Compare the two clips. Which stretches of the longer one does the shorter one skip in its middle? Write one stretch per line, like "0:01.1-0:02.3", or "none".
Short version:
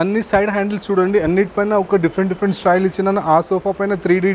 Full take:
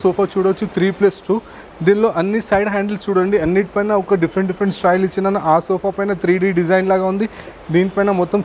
none